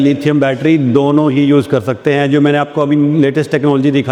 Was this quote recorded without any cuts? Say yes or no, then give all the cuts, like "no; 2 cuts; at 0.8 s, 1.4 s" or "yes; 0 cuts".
yes; 0 cuts